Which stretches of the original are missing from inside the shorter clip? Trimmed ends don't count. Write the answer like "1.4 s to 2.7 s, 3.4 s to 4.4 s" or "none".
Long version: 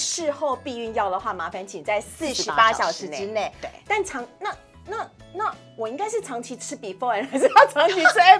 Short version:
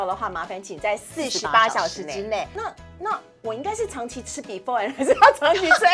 3.5 s to 4.8 s